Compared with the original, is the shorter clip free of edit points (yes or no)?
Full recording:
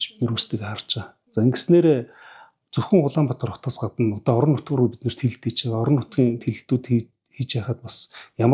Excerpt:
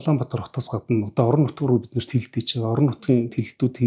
yes